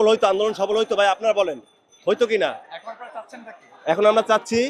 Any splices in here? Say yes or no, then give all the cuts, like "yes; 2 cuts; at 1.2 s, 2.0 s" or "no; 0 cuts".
no; 0 cuts